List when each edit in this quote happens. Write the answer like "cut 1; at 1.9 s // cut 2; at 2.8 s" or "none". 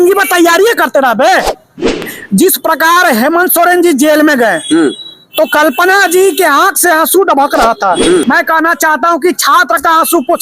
cut 1; at 2.1 s // cut 2; at 8.2 s